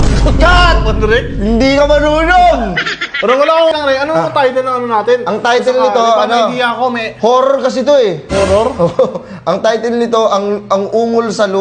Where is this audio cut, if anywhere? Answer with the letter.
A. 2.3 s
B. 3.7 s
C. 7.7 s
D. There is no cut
B